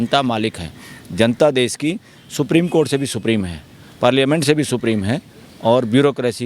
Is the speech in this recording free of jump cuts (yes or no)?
yes